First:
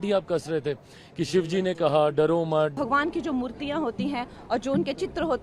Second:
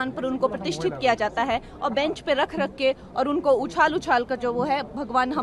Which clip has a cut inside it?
first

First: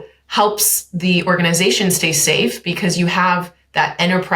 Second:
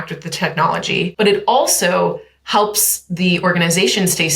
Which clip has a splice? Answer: second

